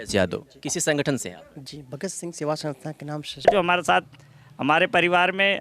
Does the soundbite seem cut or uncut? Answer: cut